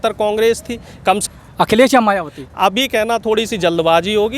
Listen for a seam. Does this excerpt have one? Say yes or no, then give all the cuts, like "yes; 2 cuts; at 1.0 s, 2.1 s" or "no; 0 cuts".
yes; 1 cut; at 1.2 s